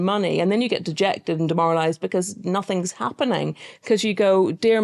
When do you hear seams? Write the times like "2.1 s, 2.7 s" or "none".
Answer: none

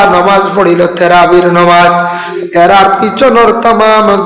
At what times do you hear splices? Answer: 2.3 s

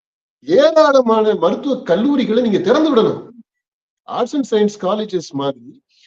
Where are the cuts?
none

